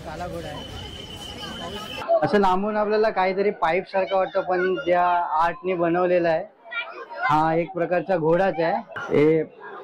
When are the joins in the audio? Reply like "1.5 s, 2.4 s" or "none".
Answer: 2.0 s, 8.9 s